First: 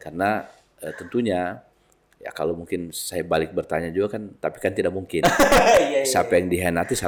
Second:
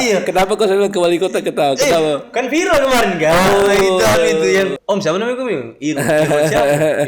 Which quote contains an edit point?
second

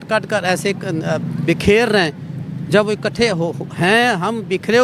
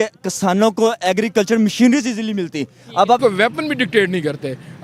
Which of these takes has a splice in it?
second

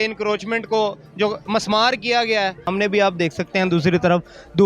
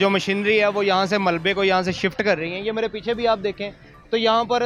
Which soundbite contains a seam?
first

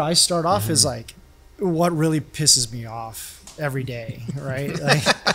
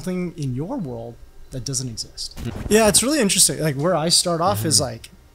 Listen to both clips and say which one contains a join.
second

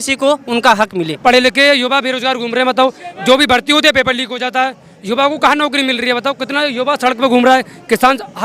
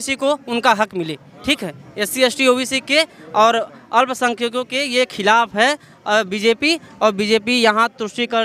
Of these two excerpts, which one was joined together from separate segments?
first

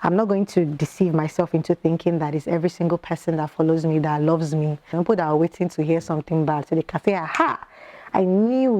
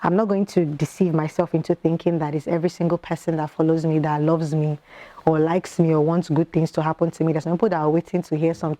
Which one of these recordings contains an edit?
first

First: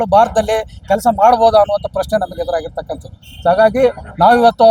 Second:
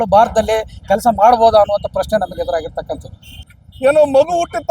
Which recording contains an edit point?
second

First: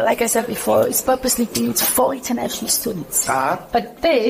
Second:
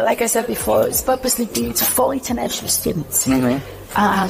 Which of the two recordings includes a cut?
first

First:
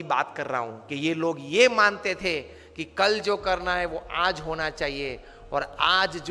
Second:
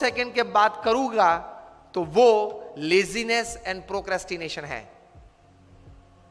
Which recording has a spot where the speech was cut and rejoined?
second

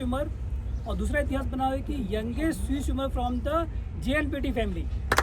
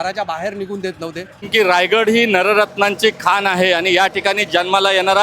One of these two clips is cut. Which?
second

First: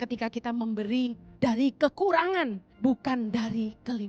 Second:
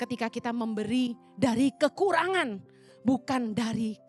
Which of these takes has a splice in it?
first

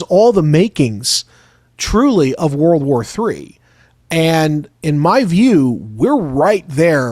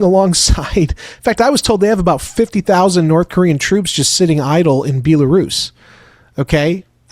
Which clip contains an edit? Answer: second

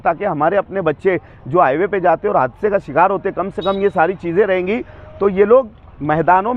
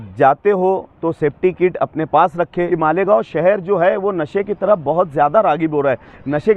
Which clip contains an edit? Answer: second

